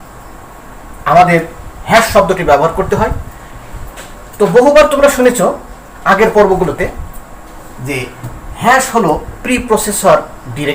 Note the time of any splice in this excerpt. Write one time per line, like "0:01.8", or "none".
none